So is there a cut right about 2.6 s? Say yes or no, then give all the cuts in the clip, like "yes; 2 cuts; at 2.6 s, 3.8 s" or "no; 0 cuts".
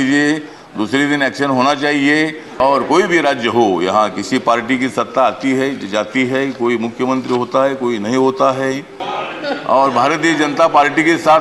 yes; 2 cuts; at 2.6 s, 9.0 s